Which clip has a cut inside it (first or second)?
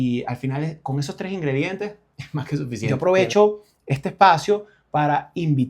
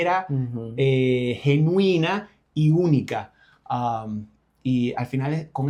first